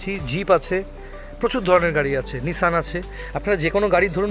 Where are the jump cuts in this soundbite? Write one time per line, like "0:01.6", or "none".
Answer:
none